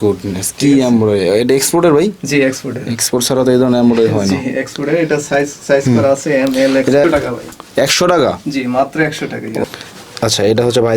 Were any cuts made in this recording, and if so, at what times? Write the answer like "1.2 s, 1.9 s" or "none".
7.0 s, 9.6 s